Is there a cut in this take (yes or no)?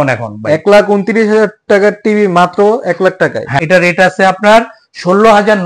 yes